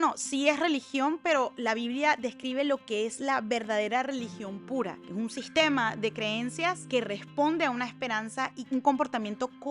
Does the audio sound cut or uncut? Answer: cut